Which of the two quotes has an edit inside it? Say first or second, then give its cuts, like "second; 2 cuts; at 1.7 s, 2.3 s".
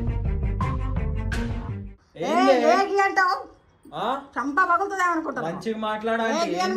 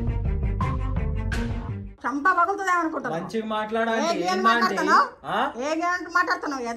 second; 1 cut; at 2.0 s